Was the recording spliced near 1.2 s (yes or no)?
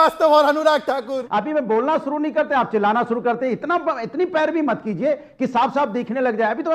yes